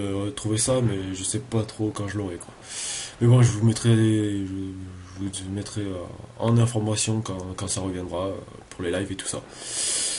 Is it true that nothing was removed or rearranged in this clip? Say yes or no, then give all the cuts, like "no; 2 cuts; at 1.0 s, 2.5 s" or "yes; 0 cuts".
yes; 0 cuts